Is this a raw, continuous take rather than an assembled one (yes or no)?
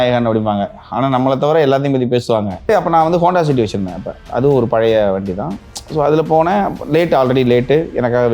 no